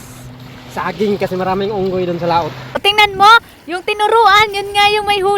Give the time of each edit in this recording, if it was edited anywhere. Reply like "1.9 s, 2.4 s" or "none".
2.8 s